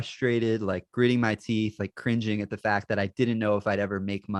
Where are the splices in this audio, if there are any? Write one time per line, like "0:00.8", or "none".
none